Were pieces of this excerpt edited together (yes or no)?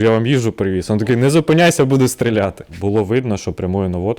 yes